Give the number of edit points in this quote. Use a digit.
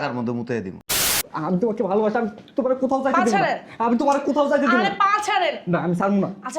1